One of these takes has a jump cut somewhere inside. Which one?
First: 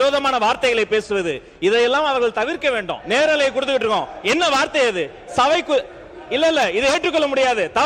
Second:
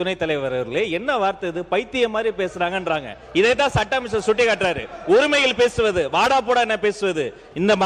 first; 1 cut; at 2.9 s

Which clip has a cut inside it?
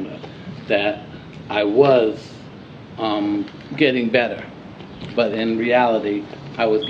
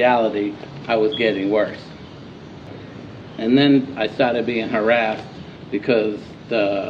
second; 1 cut; at 2.7 s

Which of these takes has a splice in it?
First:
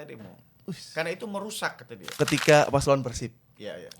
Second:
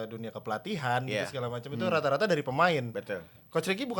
first; 1 cut; at 2.1 s

